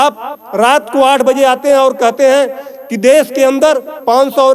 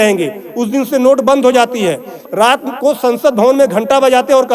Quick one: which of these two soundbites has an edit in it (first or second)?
second